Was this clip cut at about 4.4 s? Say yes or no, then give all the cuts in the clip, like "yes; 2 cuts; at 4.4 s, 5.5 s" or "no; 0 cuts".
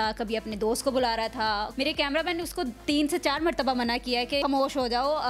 yes; 2 cuts; at 1.7 s, 4.4 s